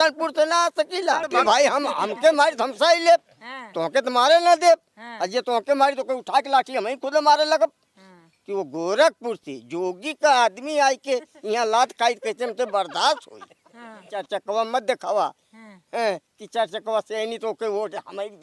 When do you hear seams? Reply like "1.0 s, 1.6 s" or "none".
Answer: 1.3 s, 14.2 s